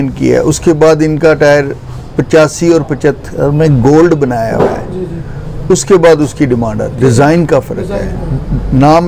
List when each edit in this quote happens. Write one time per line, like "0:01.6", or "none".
none